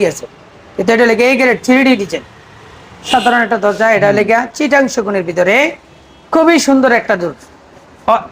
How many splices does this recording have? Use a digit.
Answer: 1